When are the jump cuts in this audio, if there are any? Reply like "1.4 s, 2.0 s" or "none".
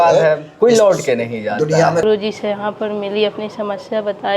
2.0 s